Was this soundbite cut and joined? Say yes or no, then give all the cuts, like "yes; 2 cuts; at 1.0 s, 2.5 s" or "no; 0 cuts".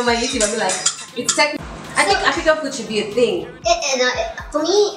no; 0 cuts